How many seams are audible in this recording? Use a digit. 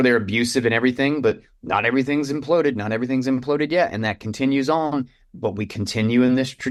0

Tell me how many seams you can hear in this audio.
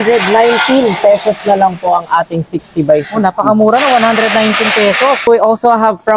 1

